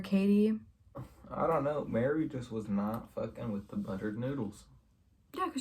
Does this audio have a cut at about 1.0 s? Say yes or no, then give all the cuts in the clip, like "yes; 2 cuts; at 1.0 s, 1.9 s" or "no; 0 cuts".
yes; 1 cut; at 1.0 s